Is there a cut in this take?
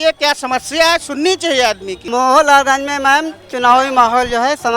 yes; 1 cut; at 1.9 s

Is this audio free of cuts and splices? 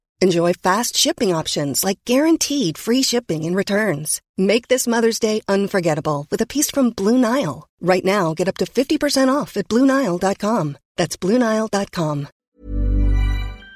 no; 1 cut; at 12.3 s

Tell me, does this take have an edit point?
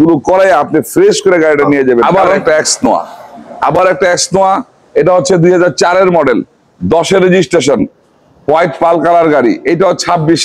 yes; 1 cut; at 2.0 s

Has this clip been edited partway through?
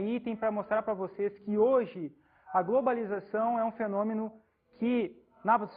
no; 0 cuts

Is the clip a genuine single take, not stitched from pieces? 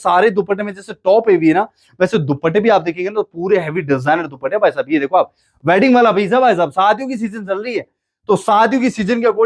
yes; 0 cuts

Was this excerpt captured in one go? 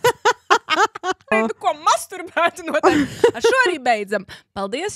no; 1 cut; at 1.3 s

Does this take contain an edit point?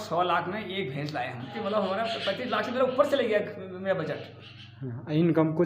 yes; 1 cut; at 1.5 s

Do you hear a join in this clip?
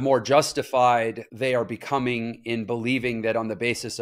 yes; 1 cut; at 1.3 s

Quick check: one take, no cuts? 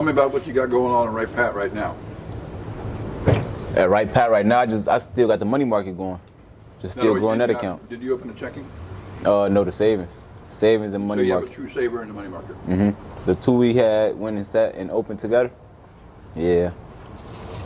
yes; 0 cuts

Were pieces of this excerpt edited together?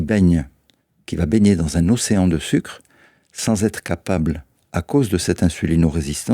no; 0 cuts

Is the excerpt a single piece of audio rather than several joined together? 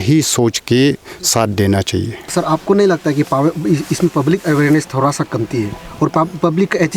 no; 1 cut; at 2.2 s

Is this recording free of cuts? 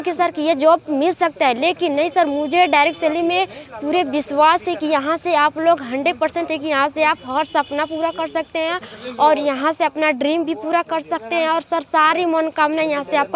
yes; 0 cuts

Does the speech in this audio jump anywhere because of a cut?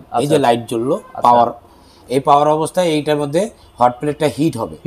no; 0 cuts

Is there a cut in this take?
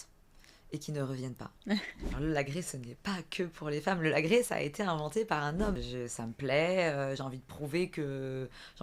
yes; 2 cuts; at 2.0 s, 5.8 s

